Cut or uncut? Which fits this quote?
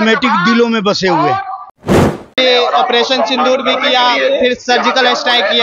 cut